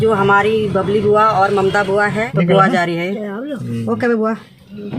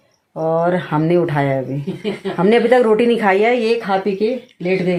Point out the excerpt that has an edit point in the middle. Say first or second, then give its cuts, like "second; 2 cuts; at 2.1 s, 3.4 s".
first; 1 cut; at 2.3 s